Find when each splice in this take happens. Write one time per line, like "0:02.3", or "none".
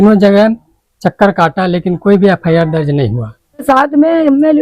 0:03.6